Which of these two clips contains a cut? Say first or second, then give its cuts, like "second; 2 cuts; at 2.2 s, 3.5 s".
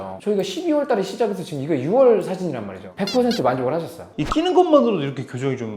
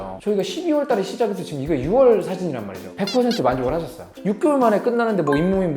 second; 1 cut; at 4.0 s